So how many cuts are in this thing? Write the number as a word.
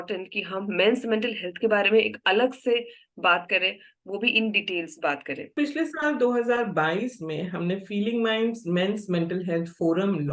one